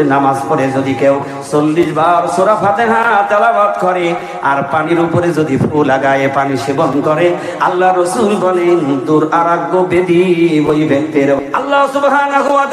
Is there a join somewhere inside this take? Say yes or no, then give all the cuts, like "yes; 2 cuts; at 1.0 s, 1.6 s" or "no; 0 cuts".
yes; 1 cut; at 11.4 s